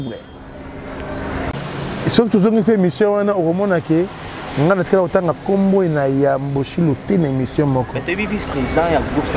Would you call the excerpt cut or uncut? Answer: cut